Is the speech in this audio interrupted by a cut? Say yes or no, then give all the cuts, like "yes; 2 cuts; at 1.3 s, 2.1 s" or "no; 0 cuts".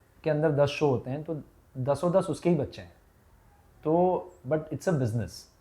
no; 0 cuts